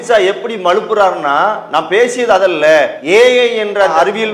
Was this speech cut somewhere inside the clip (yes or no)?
yes